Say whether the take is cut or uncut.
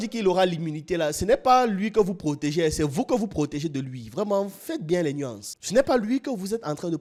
uncut